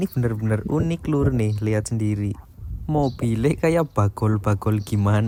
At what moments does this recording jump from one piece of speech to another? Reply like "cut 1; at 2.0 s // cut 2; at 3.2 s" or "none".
none